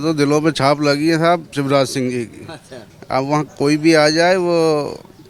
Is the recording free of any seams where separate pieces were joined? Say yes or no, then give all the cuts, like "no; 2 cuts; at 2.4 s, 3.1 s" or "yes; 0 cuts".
yes; 0 cuts